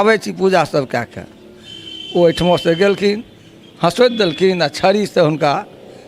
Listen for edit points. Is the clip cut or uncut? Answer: uncut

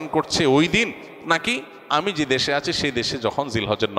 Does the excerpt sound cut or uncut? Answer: uncut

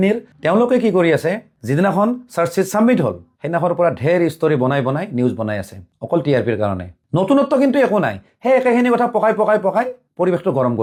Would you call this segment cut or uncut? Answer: uncut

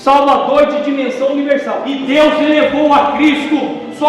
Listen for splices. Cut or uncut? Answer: cut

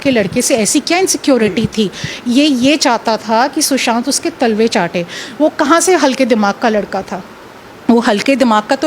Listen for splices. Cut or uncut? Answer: uncut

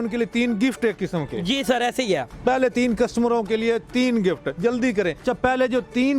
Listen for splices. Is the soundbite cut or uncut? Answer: cut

